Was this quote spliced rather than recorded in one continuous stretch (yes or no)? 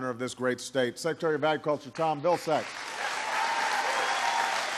yes